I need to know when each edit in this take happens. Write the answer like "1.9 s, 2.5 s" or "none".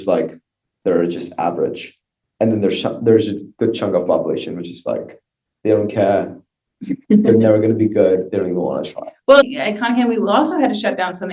9.4 s